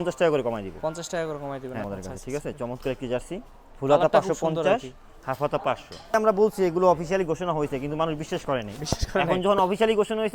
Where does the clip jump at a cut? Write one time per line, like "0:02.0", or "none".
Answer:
0:01.8
0:06.1